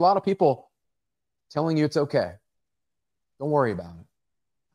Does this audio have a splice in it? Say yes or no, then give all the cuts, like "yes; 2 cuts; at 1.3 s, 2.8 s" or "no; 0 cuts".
no; 0 cuts